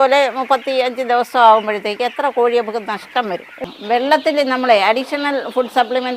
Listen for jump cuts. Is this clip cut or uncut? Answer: cut